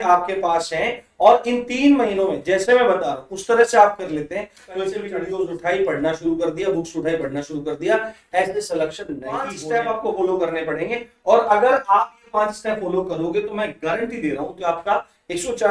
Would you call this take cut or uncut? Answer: cut